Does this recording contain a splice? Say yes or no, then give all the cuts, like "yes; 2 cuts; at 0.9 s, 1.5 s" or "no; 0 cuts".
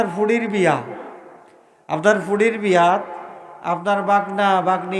no; 0 cuts